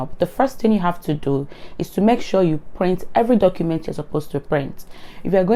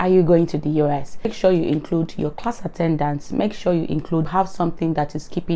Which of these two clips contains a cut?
second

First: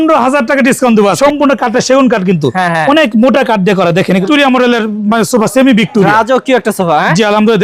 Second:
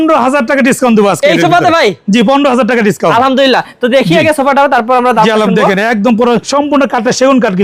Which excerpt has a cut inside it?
first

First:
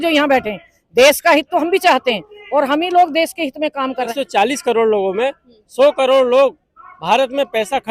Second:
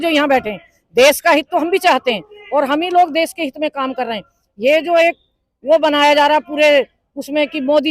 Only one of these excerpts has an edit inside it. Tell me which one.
first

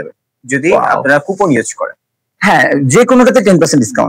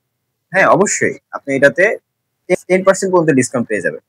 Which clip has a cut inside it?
second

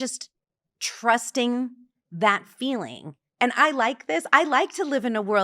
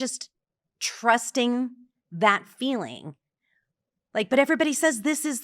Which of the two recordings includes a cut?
first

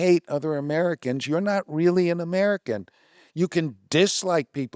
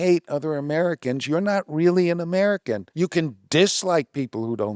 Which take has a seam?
second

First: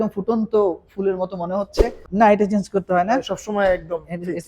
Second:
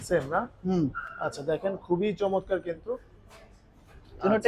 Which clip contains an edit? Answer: first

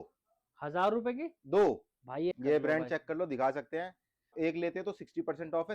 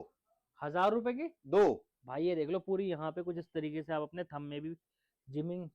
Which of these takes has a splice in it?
first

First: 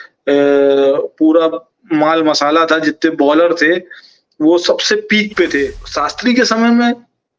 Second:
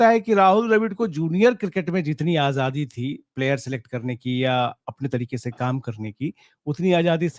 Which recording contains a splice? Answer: first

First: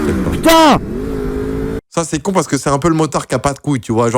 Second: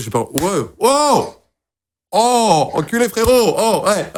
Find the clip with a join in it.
first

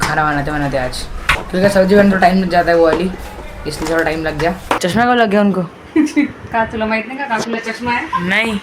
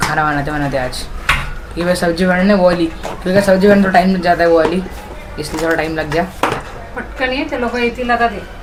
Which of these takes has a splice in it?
first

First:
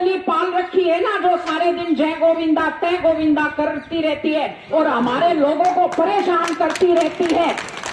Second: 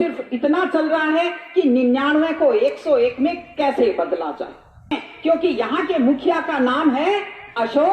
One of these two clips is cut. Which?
second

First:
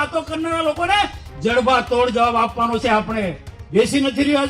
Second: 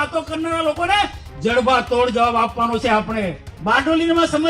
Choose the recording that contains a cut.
second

